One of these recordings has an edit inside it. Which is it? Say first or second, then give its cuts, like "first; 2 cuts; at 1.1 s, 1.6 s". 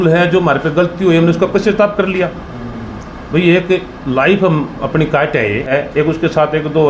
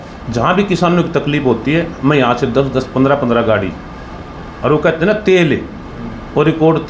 first; 1 cut; at 5.7 s